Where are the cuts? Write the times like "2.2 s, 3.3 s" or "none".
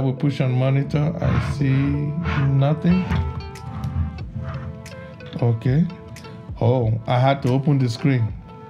3.3 s

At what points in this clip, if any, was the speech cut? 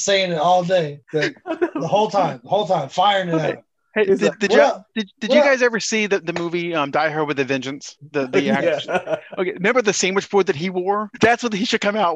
11.1 s

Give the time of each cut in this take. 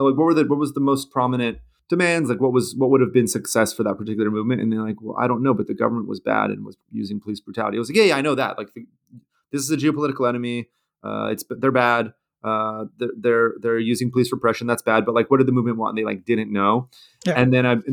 1.7 s, 6.7 s

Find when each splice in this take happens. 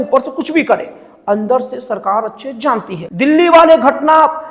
3.0 s

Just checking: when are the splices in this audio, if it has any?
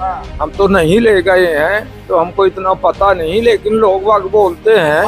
none

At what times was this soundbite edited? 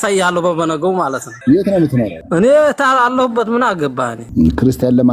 1.3 s, 2.2 s, 4.2 s

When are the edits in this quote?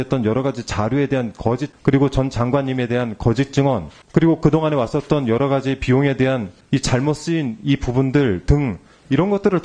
1.7 s, 4.0 s, 6.5 s

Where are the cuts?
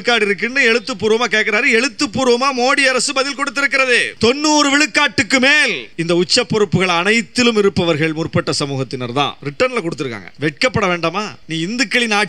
4.1 s, 5.8 s, 9.4 s, 10.2 s, 11.4 s

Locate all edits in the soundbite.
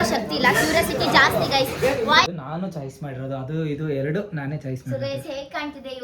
2.3 s

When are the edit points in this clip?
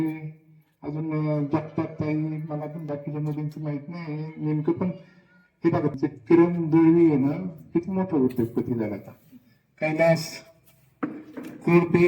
5.9 s

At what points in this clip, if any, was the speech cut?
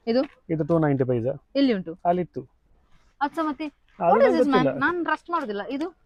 none

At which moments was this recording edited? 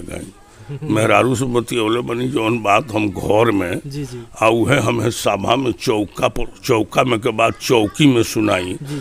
none

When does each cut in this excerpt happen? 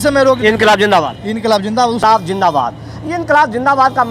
2.0 s

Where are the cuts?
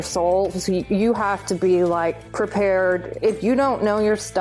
2.2 s, 3.1 s

